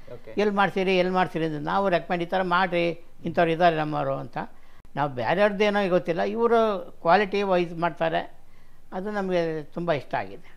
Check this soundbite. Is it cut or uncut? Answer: uncut